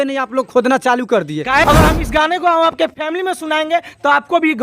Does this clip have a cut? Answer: yes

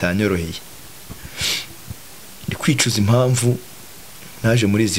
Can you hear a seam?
no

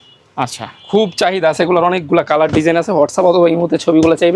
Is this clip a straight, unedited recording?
yes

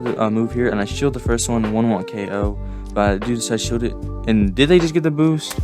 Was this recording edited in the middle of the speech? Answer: no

